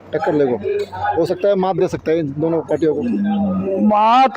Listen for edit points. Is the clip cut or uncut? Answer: uncut